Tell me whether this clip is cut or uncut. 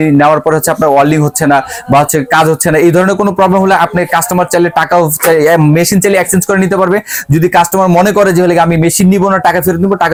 uncut